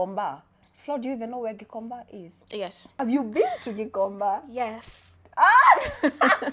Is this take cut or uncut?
uncut